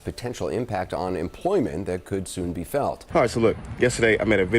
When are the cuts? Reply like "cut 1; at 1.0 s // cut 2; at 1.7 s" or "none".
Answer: cut 1; at 3.0 s